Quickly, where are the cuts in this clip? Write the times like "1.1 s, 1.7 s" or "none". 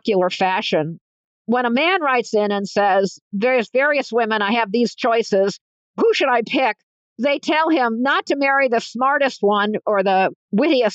1.2 s